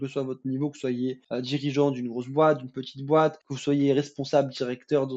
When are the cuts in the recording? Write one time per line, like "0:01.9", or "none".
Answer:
0:01.2
0:03.5